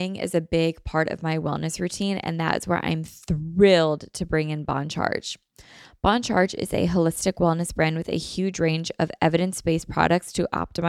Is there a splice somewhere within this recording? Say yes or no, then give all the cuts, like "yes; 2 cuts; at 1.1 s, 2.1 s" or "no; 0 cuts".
no; 0 cuts